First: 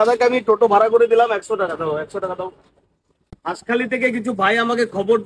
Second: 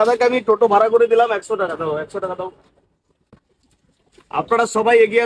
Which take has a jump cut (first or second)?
first